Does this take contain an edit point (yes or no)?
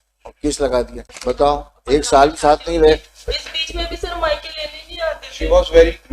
yes